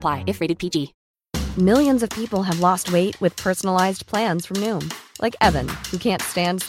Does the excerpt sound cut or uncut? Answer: cut